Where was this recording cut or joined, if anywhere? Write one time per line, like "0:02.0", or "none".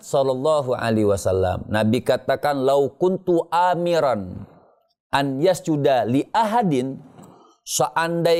none